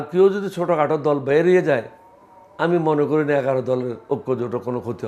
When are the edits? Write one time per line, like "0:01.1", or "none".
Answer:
none